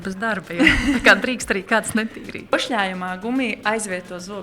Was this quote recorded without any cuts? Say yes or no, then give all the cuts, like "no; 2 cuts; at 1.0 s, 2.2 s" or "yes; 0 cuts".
no; 1 cut; at 2.5 s